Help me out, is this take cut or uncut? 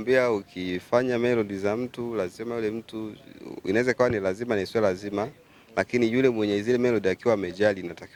uncut